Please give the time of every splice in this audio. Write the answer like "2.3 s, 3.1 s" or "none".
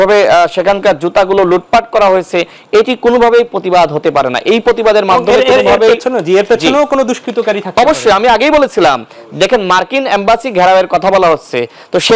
none